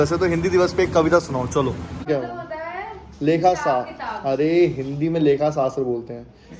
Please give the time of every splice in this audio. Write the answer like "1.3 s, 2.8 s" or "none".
2.1 s